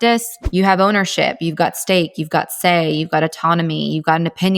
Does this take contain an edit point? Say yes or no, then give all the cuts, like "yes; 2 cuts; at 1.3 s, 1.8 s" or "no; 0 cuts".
no; 0 cuts